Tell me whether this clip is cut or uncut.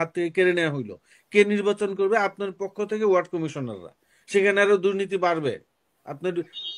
uncut